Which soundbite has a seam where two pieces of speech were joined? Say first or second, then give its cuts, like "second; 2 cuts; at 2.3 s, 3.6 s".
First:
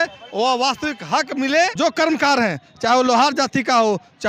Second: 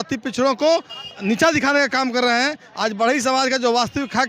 first; 1 cut; at 1.7 s